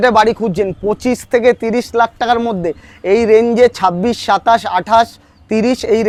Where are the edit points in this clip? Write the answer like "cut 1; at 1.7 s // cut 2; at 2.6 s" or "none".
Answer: none